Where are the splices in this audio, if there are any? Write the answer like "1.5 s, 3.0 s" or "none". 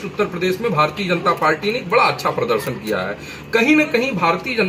none